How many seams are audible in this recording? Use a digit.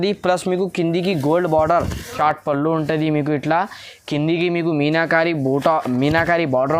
1